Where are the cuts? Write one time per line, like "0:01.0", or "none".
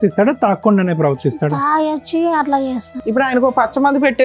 0:02.9